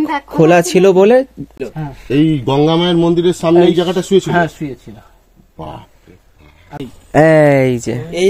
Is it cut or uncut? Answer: cut